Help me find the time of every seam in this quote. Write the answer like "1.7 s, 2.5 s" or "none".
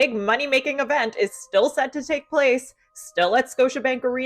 2.1 s